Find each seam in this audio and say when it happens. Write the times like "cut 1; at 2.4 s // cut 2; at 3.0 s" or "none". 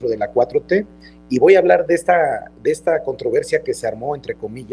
none